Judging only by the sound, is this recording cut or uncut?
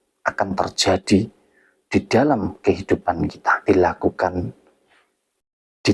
cut